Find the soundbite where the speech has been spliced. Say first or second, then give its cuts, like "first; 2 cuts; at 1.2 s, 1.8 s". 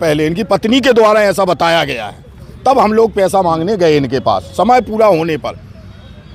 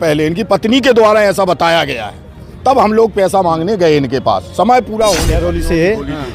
second; 1 cut; at 5.4 s